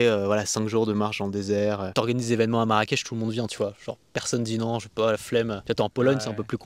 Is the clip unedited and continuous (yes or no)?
no